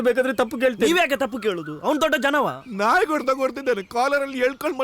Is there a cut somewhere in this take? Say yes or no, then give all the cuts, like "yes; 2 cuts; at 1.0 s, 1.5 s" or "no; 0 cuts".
yes; 1 cut; at 2.6 s